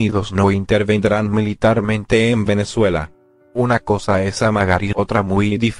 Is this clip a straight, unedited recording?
yes; 0 cuts

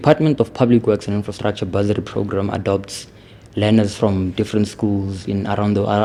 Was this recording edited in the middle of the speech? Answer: no; 0 cuts

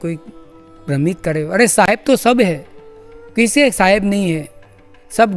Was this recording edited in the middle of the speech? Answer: no; 0 cuts

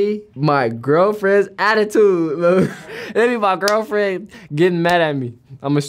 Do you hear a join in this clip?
yes; 1 cut; at 2.9 s

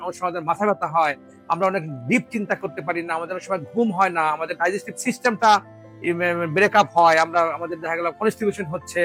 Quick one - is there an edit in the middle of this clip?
no; 0 cuts

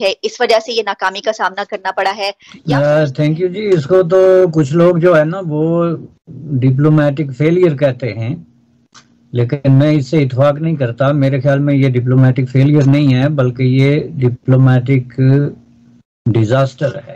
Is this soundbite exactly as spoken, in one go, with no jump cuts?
no; 1 cut; at 2.5 s

